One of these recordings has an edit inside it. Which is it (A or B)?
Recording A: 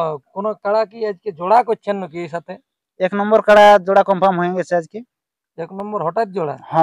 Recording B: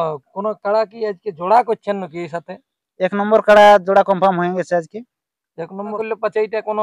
B